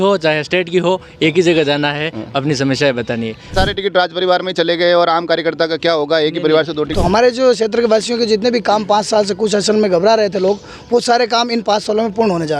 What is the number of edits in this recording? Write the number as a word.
two